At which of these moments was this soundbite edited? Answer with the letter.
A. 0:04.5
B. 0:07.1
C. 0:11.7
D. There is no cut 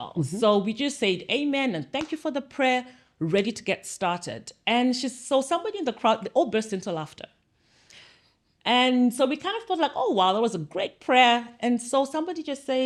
D